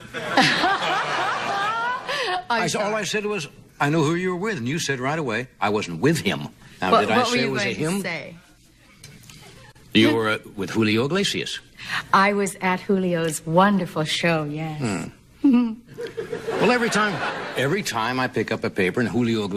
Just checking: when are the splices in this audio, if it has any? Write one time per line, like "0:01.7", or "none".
0:06.5